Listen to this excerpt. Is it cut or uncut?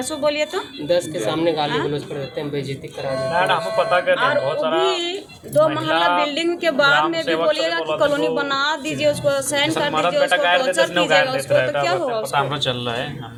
uncut